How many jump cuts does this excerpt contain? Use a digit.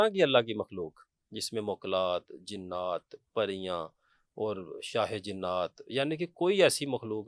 0